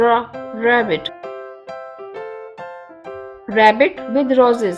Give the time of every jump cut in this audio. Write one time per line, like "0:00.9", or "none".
0:01.1
0:03.3